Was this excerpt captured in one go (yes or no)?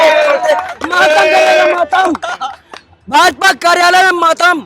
yes